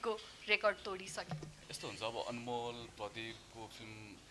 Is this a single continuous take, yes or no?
yes